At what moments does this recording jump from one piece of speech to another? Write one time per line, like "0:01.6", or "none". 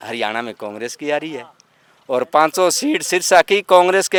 none